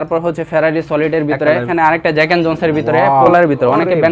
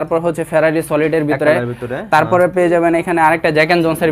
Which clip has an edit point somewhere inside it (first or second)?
first